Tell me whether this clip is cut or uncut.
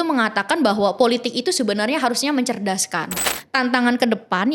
cut